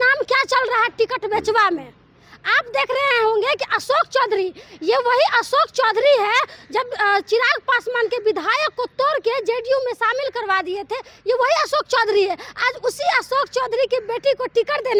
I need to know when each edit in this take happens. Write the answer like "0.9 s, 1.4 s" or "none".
none